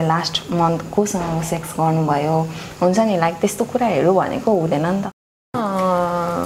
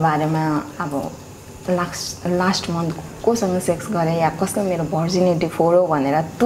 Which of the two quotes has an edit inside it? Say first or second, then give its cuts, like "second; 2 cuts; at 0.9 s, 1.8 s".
first; 1 cut; at 5.6 s